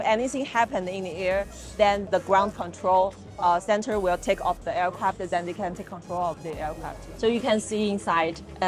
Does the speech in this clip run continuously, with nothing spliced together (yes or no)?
yes